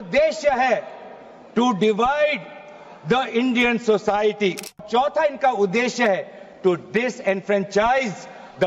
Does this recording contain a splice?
yes; 1 cut; at 4.8 s

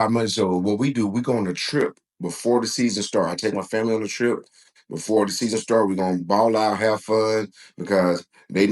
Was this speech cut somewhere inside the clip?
no; 0 cuts

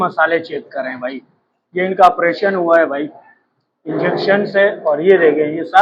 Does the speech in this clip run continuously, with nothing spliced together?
yes; 0 cuts

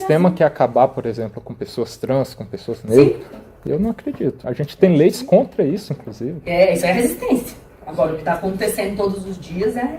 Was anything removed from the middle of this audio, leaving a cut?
no; 0 cuts

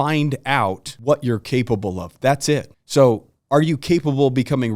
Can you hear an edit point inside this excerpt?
yes; 2 cuts; at 0.9 s, 2.8 s

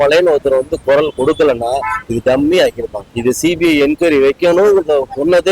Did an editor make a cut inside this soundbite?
yes; 1 cut; at 3.1 s

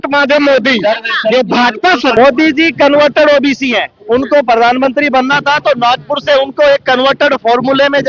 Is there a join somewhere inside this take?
yes; 1 cut; at 2.1 s

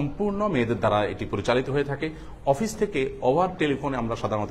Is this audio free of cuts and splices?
yes; 0 cuts

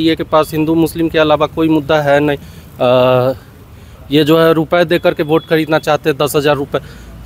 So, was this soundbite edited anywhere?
no; 0 cuts

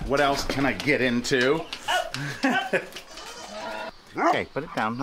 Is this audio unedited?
no; 1 cut; at 3.9 s

